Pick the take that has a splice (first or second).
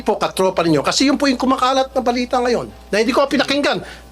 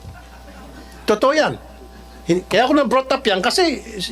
first